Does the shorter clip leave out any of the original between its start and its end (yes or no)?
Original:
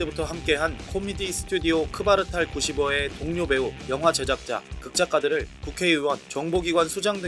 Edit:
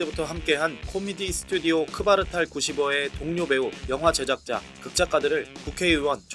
no